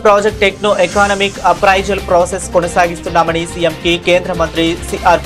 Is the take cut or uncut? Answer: uncut